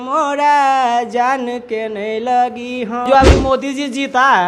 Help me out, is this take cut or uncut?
cut